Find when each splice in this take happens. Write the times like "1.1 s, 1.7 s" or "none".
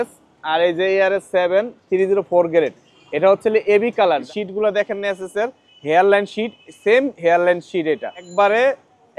4.2 s, 8.3 s